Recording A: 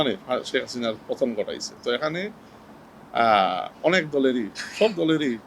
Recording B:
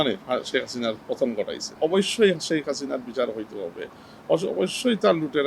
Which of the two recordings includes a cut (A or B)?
B